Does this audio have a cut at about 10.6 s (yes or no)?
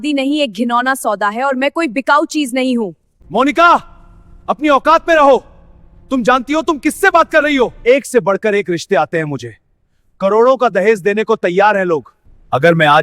no